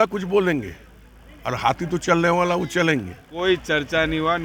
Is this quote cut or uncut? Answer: cut